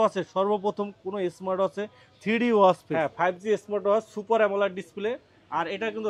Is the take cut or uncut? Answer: cut